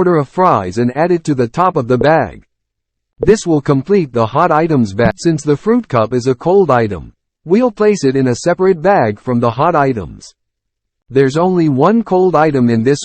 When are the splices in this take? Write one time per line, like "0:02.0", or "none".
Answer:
0:05.2